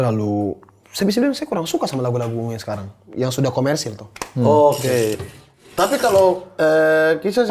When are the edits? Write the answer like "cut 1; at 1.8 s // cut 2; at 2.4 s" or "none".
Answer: cut 1; at 5.1 s